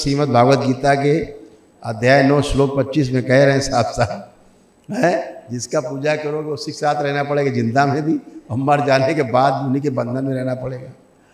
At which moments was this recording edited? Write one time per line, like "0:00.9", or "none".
none